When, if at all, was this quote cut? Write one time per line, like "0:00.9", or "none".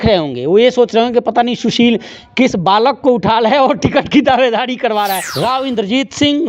0:05.2